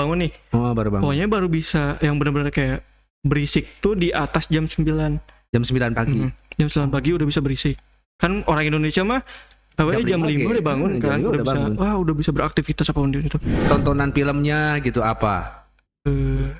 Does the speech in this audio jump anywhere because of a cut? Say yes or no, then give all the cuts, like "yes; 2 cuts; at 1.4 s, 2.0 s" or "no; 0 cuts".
yes; 1 cut; at 13.5 s